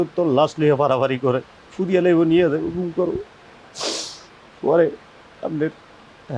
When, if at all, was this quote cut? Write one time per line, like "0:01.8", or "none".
none